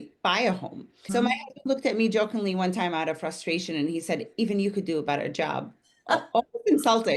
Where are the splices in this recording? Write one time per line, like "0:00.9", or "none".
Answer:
0:01.1